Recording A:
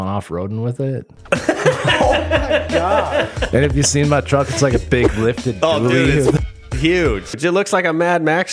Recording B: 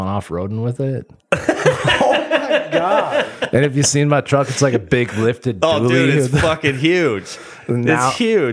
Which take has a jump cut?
A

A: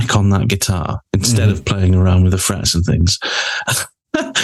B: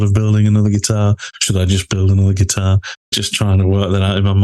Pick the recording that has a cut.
B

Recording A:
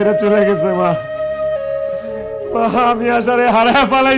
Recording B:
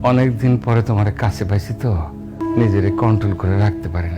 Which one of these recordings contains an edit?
B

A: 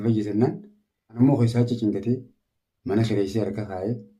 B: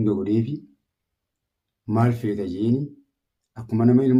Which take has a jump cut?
A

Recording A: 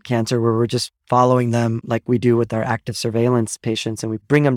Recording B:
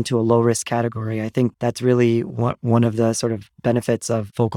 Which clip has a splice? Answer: A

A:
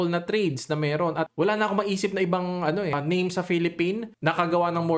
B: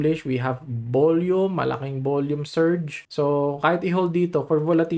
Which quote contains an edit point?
A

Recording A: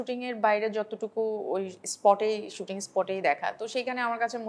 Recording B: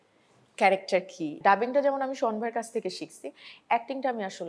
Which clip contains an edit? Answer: B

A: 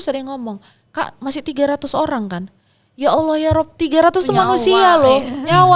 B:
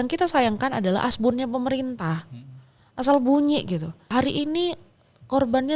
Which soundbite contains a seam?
B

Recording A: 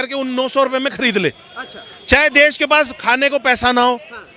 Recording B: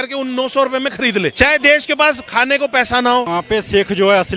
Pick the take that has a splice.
B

